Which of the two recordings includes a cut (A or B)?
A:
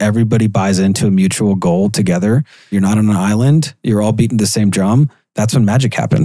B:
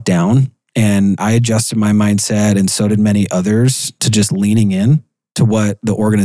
A